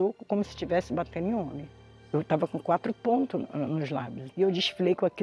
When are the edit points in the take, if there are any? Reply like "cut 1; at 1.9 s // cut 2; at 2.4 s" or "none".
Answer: cut 1; at 2.0 s